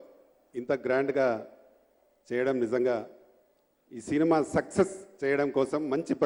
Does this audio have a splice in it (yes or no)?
no